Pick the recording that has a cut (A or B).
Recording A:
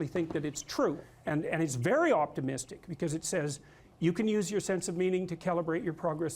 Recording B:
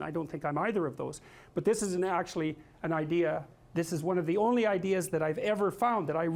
A